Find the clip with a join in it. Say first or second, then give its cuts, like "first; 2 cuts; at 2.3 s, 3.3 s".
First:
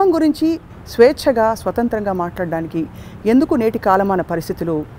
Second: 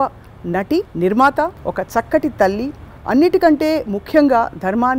second; 2 cuts; at 0.9 s, 1.6 s